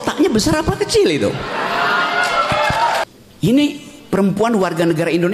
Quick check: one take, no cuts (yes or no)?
no